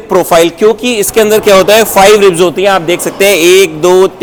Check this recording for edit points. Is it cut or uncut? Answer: uncut